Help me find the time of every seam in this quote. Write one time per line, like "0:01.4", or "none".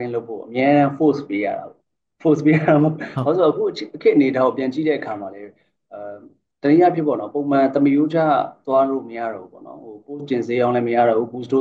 none